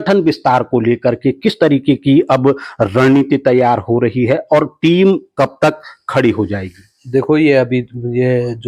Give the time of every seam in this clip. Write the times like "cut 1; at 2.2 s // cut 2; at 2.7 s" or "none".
none